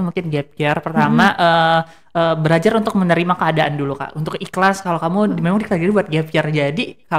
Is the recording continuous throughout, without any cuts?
yes; 0 cuts

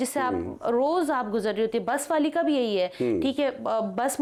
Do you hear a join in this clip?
no; 0 cuts

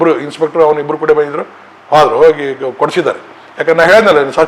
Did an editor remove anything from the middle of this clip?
no; 0 cuts

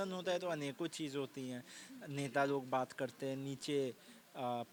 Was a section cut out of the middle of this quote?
no; 0 cuts

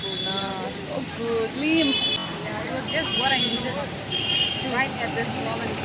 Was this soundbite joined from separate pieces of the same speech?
yes; 1 cut; at 2.2 s

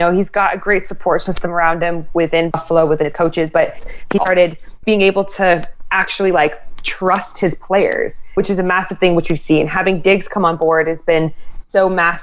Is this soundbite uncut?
no; 3 cuts; at 2.5 s, 4.8 s, 8.3 s

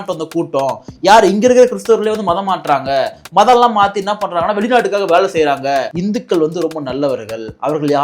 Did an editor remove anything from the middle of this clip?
yes; 1 cut; at 5.9 s

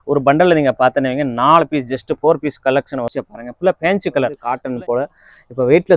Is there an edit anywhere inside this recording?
yes; 2 cuts; at 3.1 s, 4.4 s

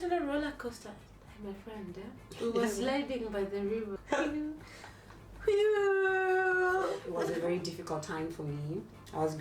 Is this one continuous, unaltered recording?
no; 2 cuts; at 4.0 s, 7.1 s

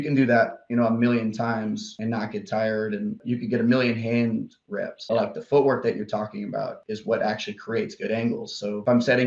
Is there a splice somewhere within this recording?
yes; 2 cuts; at 3.2 s, 6.8 s

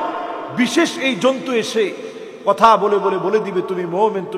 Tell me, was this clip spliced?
no; 0 cuts

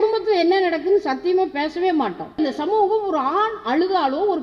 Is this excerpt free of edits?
no; 1 cut; at 2.4 s

